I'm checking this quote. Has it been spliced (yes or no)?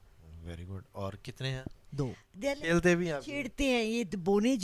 yes